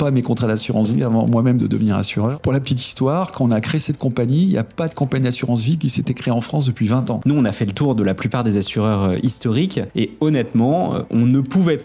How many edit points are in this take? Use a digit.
2